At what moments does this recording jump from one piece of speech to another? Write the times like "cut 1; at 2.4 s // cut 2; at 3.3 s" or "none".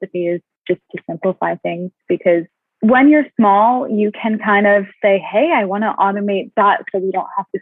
cut 1; at 2.6 s